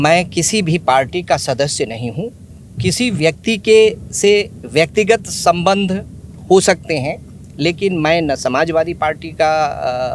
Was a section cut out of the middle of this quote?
no; 0 cuts

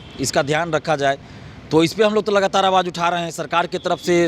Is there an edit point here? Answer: no; 0 cuts

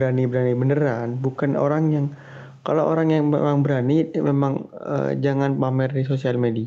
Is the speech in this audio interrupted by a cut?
no; 0 cuts

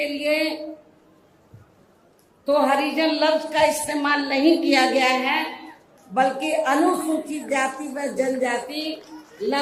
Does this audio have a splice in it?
no; 0 cuts

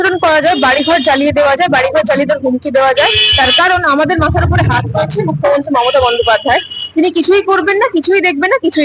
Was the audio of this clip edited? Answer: no; 0 cuts

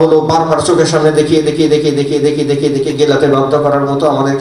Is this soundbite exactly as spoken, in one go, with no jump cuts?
yes; 0 cuts

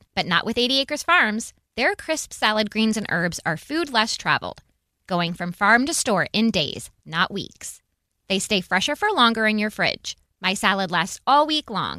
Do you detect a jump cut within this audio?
no; 0 cuts

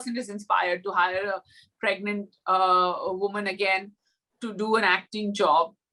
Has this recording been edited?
no; 0 cuts

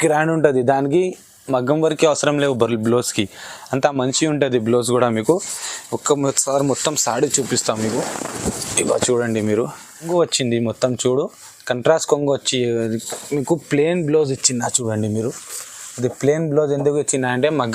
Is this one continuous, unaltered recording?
no; 1 cut; at 10.1 s

